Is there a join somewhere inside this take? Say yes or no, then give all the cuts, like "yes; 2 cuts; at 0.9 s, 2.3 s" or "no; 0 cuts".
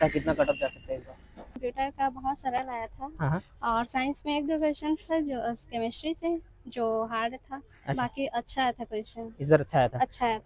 yes; 1 cut; at 1.5 s